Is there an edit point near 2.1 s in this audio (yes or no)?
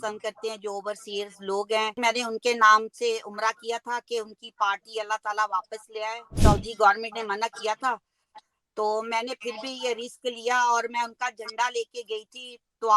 yes